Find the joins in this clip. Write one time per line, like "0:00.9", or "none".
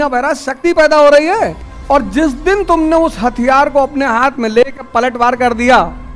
0:01.7